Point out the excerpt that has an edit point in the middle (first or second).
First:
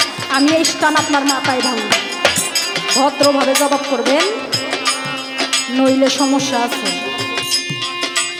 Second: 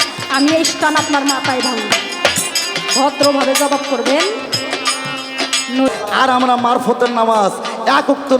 second